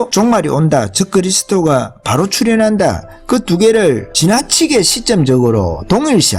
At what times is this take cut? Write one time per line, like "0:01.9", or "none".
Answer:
none